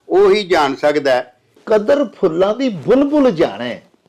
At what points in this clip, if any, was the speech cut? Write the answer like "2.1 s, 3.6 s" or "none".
1.6 s